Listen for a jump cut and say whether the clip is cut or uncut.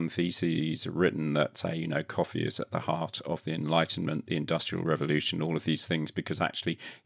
uncut